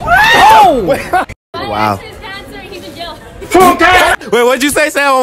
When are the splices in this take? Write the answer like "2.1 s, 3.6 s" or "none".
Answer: 1.1 s